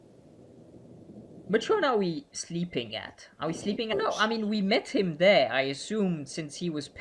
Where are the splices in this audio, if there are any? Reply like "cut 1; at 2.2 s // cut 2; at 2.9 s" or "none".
none